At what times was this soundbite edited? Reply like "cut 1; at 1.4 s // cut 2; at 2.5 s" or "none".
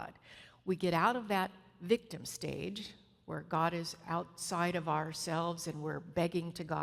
none